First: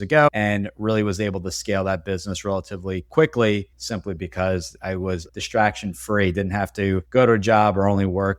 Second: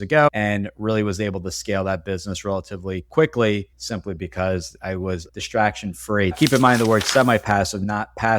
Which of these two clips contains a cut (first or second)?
second